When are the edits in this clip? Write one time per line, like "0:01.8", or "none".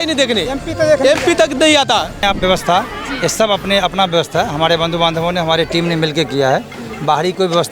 0:02.2